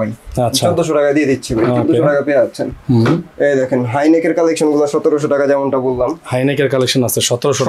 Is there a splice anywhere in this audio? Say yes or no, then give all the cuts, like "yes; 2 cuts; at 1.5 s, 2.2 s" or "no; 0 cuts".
no; 0 cuts